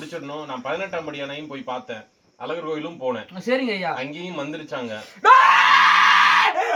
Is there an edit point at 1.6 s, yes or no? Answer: no